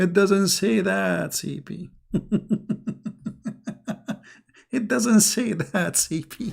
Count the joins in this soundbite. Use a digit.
0